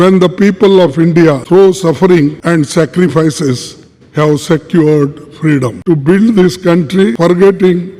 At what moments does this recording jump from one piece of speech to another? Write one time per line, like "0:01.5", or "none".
0:01.4
0:02.4
0:05.8
0:07.2